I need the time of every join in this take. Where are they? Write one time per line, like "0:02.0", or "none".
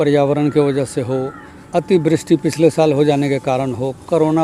none

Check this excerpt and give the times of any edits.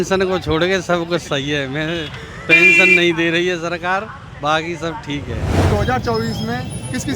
0:05.7

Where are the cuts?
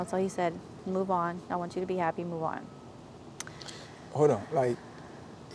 none

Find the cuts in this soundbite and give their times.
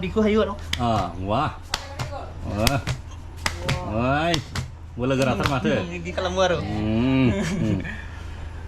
none

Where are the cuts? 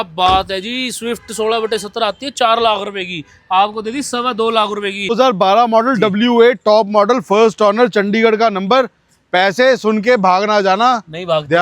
0:05.1

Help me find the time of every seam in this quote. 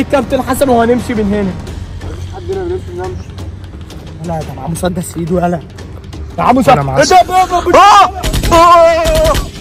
none

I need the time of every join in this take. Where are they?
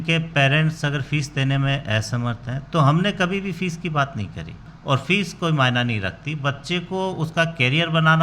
0:04.7

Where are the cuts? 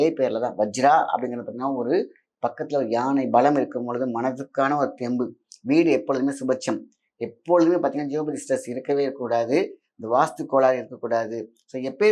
none

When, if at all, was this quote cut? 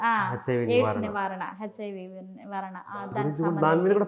none

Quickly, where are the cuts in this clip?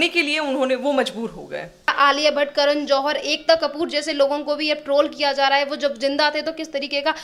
none

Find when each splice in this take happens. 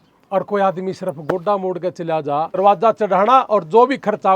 0:02.6

